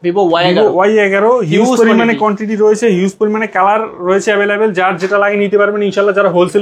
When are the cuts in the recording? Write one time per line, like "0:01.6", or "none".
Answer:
none

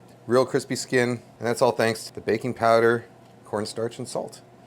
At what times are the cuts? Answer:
0:01.3
0:02.0

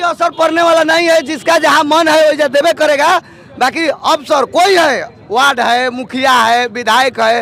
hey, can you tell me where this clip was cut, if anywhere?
none

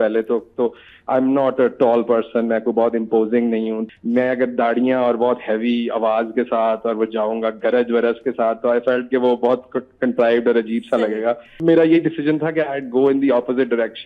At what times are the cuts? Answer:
0:03.8
0:11.5

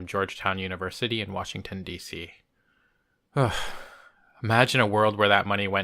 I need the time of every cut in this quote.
none

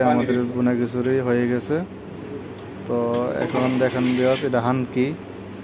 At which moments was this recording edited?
none

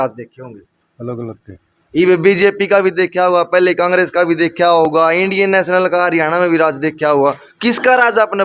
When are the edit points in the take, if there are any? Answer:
none

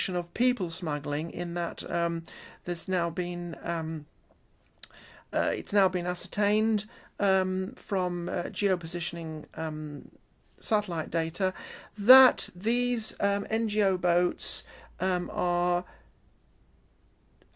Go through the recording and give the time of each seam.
0:12.5

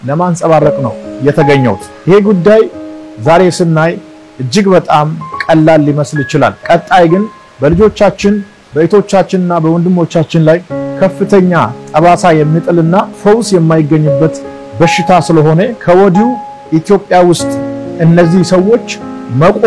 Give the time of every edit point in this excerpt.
0:13.1
0:15.8

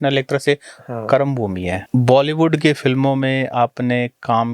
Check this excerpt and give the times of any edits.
0:01.8

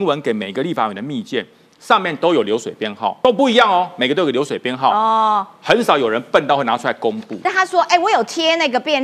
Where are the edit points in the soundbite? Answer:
0:03.2
0:07.4

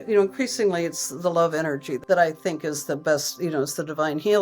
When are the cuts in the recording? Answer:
0:02.2

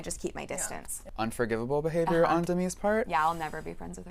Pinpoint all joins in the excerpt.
0:00.9

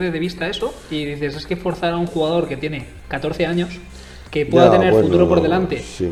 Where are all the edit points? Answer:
none

